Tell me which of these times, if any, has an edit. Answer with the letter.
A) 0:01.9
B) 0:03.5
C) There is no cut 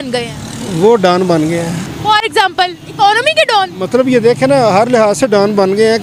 C